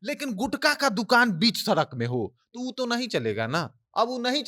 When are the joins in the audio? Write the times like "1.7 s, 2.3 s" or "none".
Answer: none